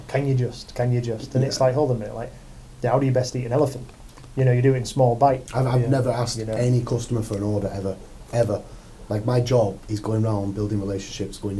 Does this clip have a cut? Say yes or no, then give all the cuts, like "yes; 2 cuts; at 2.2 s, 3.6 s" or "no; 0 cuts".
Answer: yes; 1 cut; at 5.4 s